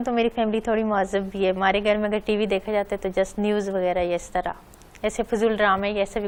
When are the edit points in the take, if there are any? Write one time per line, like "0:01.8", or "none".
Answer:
none